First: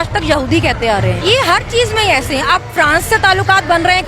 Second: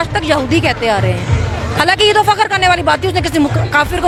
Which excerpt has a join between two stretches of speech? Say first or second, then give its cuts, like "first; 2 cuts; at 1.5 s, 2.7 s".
first; 1 cut; at 1.2 s